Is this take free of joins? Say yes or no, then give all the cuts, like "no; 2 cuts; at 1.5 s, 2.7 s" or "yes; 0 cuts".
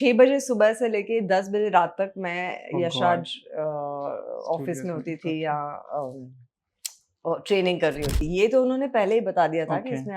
no; 1 cut; at 8.2 s